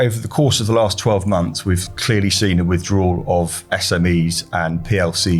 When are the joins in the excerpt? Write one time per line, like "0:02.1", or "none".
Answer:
0:01.9